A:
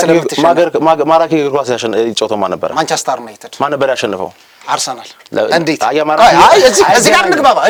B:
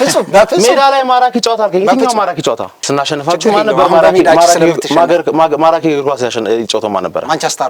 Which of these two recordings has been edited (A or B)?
B